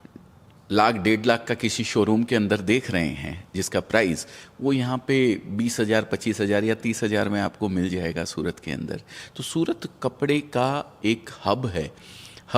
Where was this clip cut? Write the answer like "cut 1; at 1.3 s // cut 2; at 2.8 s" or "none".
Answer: none